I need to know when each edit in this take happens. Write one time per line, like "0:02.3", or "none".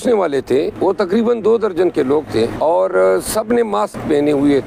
0:01.1
0:02.5